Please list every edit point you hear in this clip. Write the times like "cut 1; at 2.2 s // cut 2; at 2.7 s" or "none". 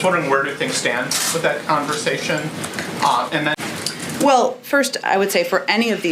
cut 1; at 3.6 s

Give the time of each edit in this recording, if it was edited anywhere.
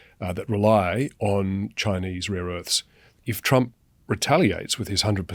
cut 1; at 3.2 s

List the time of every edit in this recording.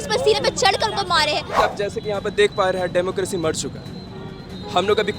cut 1; at 1.6 s

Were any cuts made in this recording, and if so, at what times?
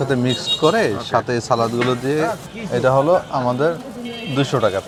none

